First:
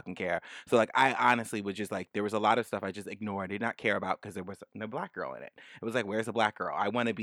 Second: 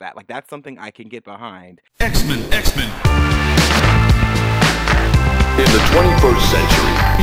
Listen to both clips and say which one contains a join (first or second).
second